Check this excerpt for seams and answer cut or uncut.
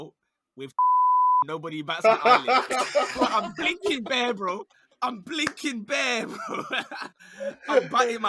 uncut